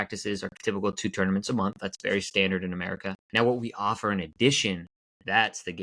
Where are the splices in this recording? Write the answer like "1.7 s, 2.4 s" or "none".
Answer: 3.2 s